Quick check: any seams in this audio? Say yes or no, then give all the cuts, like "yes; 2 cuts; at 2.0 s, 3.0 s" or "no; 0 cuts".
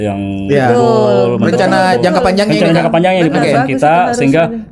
no; 0 cuts